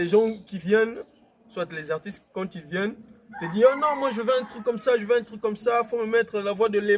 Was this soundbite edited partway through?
no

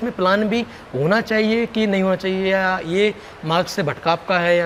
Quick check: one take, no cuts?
yes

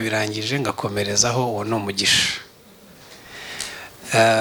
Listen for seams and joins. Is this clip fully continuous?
yes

